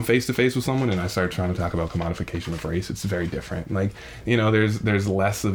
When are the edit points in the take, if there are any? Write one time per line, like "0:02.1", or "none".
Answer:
none